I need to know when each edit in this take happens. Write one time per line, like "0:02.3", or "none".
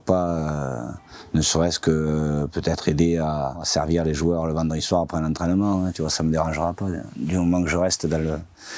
none